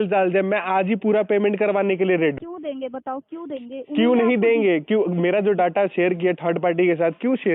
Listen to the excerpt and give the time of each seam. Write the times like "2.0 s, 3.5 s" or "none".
2.4 s